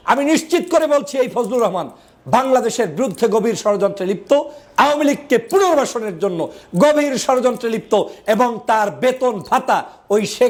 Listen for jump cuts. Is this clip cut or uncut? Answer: uncut